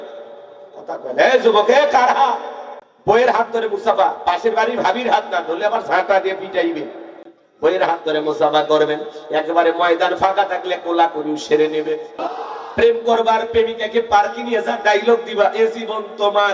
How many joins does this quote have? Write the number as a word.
one